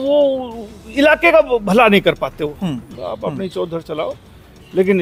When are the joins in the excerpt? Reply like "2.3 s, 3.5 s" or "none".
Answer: 2.9 s